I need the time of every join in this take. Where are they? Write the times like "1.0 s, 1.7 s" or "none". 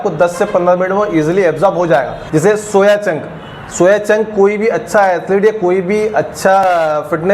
2.2 s